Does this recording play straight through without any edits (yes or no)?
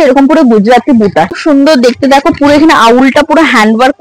no